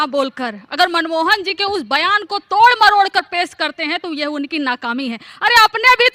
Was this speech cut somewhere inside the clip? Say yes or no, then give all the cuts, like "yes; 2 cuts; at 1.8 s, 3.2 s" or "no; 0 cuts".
no; 0 cuts